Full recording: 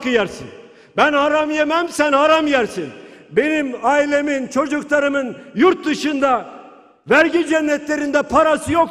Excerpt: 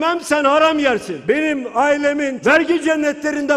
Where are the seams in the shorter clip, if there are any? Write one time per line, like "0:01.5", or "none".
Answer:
0:01.1
0:02.4